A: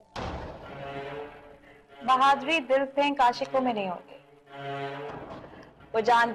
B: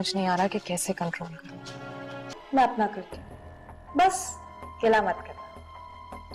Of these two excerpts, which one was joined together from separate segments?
B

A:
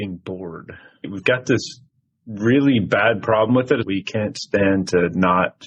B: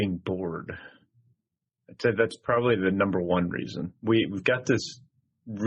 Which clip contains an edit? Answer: A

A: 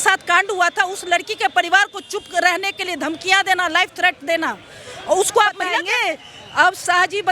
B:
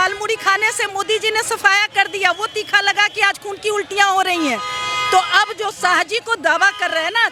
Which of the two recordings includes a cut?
A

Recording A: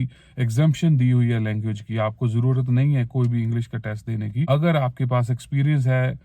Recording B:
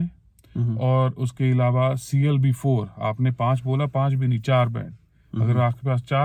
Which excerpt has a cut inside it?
A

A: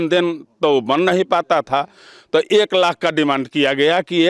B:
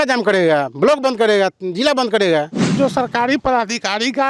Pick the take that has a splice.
B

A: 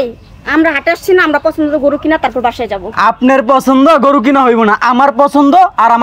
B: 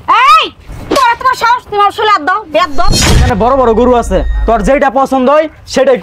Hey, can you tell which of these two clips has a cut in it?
B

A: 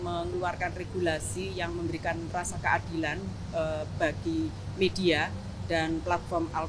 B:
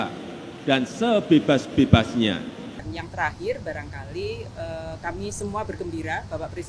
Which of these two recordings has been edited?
B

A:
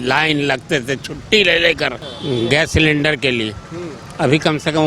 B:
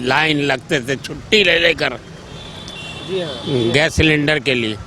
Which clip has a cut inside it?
A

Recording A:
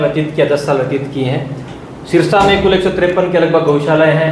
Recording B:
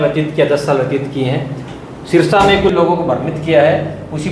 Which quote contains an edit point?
B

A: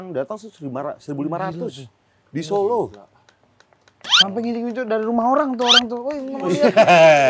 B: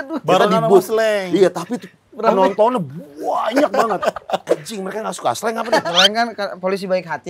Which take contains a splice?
B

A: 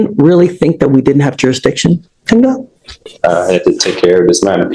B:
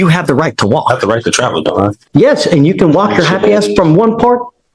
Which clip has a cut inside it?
B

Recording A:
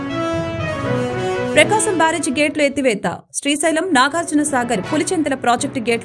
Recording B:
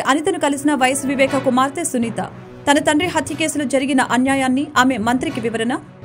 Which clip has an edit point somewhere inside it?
A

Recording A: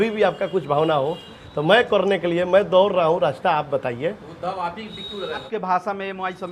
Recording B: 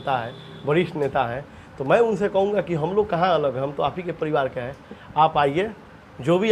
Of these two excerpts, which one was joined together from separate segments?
A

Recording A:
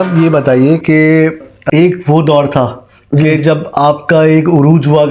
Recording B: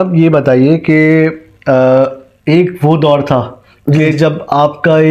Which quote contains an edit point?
A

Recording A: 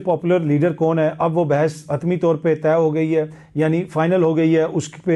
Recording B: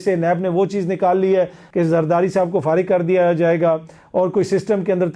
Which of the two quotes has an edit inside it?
B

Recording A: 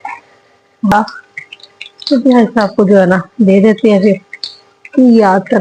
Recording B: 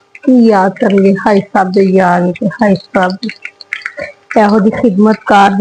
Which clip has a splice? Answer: A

